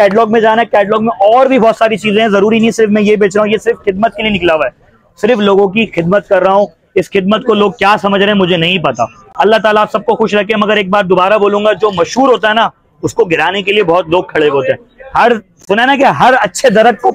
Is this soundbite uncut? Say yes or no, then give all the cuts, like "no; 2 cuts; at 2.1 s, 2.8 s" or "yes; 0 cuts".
yes; 0 cuts